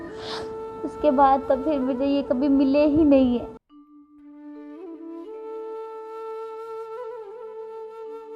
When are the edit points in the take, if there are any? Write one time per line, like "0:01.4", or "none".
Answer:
0:00.8
0:03.6